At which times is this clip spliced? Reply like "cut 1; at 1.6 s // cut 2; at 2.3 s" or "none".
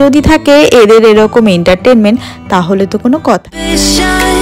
cut 1; at 3.5 s